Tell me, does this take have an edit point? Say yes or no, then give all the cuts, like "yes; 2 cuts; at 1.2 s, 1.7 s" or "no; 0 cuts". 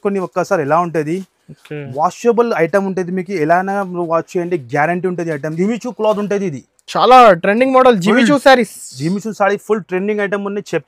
yes; 1 cut; at 5.5 s